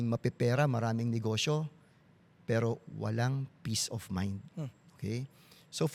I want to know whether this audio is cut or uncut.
uncut